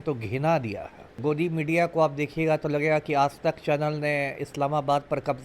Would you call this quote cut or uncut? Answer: cut